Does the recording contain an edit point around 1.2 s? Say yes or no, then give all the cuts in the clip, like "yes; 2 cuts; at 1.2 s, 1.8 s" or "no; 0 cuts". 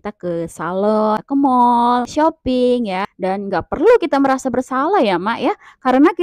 yes; 3 cuts; at 1.2 s, 2.1 s, 3.1 s